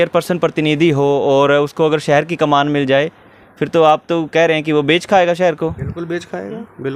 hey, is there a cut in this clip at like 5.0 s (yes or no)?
no